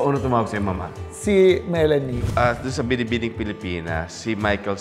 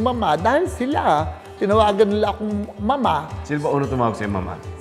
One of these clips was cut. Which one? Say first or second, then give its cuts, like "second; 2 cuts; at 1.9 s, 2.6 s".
first; 1 cut; at 2.2 s